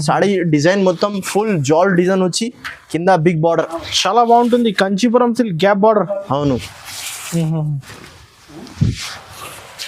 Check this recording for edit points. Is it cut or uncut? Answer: uncut